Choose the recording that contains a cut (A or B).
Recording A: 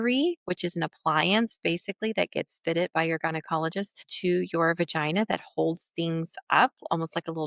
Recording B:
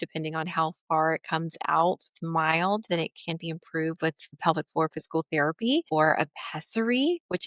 B